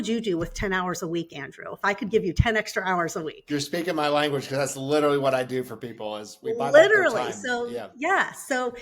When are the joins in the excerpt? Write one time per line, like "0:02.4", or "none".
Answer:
none